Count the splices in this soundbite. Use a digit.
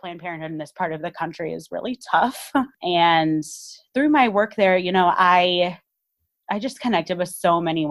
1